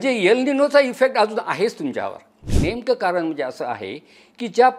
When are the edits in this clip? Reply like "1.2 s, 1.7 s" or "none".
2.5 s